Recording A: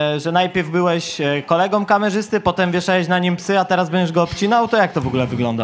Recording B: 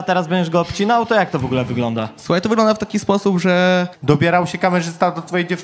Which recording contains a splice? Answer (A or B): B